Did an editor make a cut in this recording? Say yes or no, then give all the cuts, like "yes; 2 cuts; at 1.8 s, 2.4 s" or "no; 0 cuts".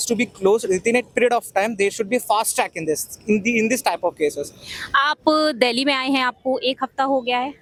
no; 0 cuts